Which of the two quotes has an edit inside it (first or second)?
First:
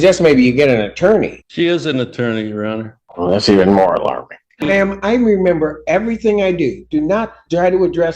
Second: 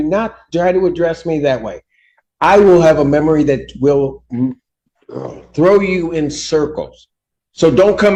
first